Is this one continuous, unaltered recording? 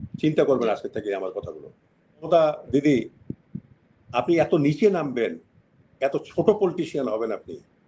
no; 1 cut; at 2.3 s

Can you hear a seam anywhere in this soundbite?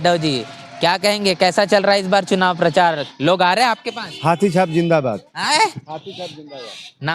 no; 0 cuts

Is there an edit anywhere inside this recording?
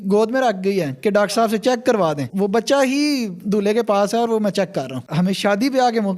yes; 2 cuts; at 2.2 s, 5.0 s

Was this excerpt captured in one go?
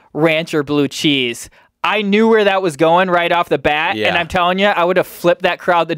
yes; 0 cuts

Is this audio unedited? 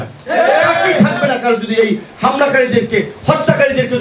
yes; 0 cuts

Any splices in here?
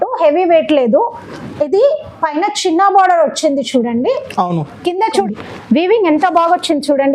yes; 1 cut; at 5.1 s

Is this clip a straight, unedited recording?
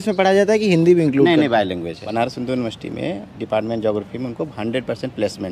no; 1 cut; at 2.1 s

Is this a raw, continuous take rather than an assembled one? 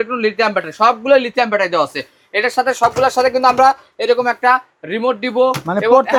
yes; 0 cuts

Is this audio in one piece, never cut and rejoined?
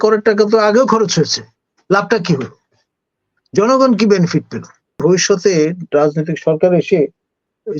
no; 1 cut; at 5.0 s

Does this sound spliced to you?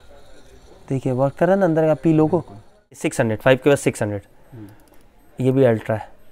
yes; 1 cut; at 3.1 s

